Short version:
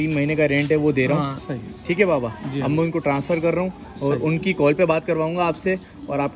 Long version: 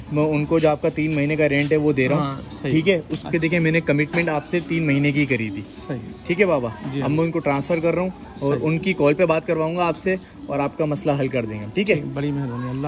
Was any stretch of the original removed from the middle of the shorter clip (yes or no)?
yes